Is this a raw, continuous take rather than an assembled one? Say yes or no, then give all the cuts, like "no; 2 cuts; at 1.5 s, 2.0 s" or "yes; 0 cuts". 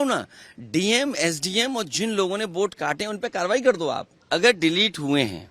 no; 1 cut; at 4.1 s